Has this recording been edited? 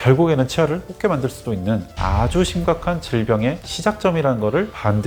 no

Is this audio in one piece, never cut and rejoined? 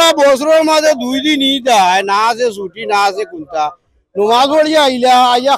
yes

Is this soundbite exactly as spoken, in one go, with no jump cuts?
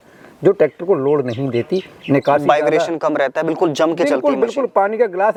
yes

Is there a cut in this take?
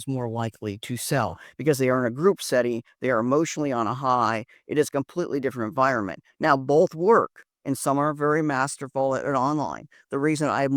no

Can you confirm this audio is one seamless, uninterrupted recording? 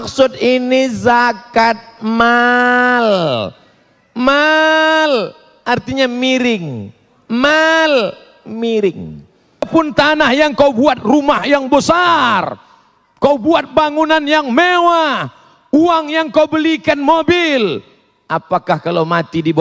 no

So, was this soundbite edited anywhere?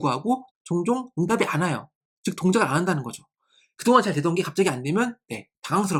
no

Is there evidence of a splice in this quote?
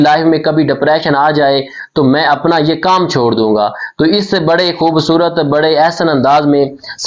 no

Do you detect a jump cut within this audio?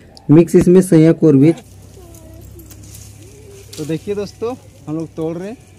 yes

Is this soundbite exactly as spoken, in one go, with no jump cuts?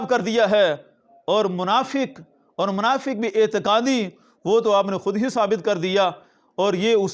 yes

